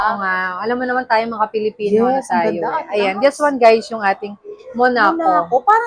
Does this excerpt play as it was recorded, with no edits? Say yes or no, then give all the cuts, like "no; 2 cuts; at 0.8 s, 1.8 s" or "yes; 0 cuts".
yes; 0 cuts